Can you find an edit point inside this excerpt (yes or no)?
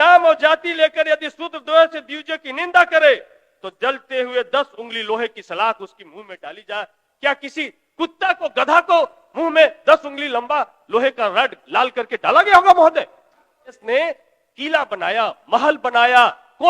yes